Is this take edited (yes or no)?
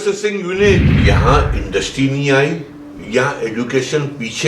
yes